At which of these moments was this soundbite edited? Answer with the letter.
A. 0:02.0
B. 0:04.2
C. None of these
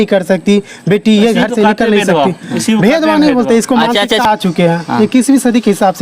B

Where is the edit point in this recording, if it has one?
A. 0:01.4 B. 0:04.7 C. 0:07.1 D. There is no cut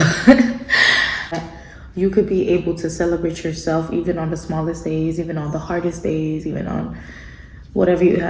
A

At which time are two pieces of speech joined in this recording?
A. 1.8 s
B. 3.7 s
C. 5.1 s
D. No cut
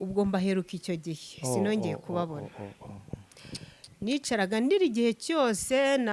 D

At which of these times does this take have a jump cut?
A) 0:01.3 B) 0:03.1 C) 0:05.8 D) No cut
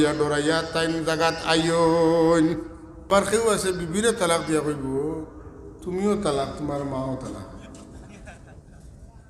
B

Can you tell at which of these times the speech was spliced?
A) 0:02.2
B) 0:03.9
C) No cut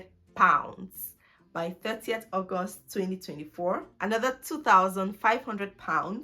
B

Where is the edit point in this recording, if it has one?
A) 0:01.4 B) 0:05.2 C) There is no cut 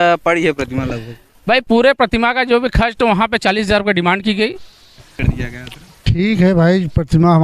B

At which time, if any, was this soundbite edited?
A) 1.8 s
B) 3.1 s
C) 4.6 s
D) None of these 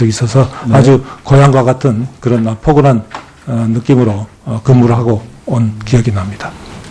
C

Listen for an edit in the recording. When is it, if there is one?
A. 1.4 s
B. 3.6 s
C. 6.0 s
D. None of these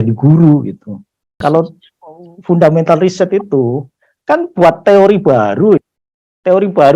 A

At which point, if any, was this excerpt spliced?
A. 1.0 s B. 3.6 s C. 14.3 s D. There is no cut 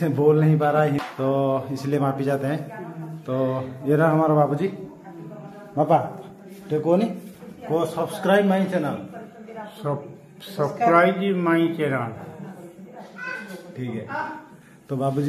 A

